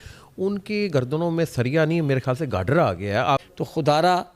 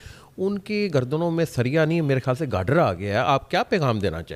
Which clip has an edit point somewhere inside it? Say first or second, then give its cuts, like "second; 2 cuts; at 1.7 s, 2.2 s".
first; 1 cut; at 3.4 s